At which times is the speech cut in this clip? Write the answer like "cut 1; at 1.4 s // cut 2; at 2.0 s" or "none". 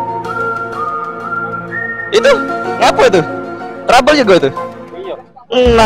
none